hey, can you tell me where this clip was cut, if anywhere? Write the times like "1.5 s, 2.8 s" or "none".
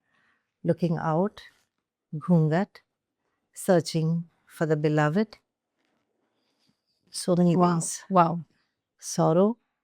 none

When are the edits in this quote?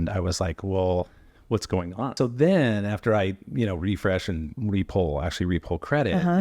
2.1 s

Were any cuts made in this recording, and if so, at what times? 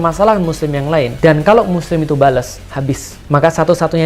1.1 s, 3.1 s

